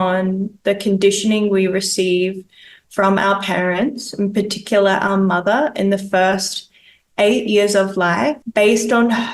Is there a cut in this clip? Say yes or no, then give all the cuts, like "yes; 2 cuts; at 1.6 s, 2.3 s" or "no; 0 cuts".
no; 0 cuts